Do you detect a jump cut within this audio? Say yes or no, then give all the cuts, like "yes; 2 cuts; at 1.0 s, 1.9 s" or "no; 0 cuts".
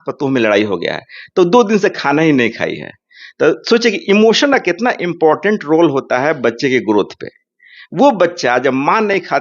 no; 0 cuts